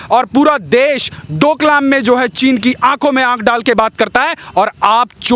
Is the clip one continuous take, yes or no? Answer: yes